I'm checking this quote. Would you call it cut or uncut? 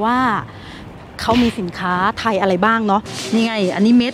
cut